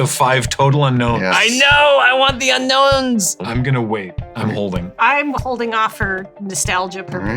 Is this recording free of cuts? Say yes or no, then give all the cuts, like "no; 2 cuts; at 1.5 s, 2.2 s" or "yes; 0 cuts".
no; 1 cut; at 3.5 s